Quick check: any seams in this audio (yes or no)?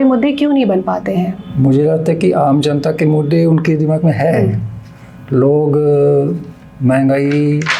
no